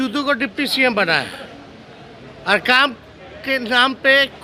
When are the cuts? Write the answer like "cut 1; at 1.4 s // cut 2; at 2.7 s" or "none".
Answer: none